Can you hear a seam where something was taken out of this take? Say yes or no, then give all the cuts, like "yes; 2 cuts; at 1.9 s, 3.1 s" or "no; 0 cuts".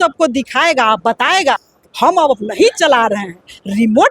yes; 1 cut; at 1.8 s